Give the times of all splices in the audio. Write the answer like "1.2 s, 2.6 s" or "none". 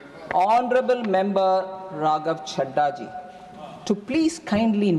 none